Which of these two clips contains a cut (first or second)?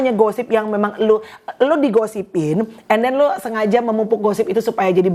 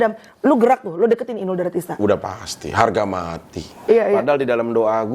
second